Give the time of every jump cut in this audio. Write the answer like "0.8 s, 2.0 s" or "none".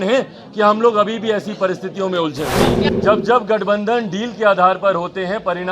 2.8 s